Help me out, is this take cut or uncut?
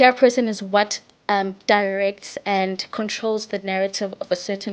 uncut